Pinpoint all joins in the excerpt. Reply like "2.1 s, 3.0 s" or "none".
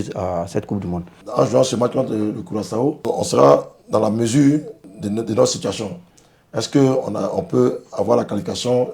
1.2 s, 3.0 s, 4.8 s